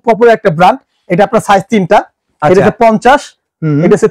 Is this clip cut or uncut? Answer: uncut